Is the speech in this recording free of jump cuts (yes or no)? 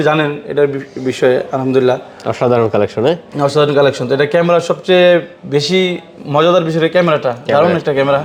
yes